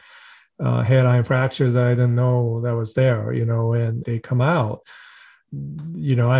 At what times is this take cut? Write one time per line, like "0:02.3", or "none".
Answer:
0:04.9